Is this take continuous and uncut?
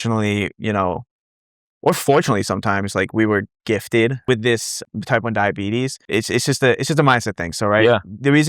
no; 2 cuts; at 4.4 s, 6.0 s

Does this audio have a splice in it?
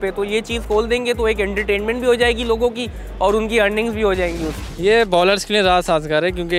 yes; 1 cut; at 4.5 s

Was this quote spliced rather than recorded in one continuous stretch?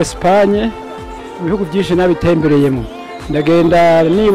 no; 0 cuts

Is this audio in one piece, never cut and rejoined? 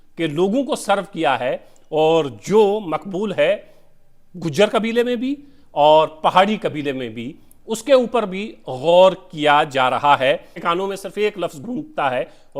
no; 1 cut; at 10.5 s

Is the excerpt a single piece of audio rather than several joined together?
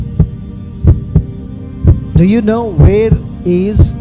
no; 1 cut; at 1.6 s

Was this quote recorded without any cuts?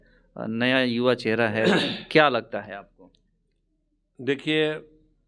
yes; 0 cuts

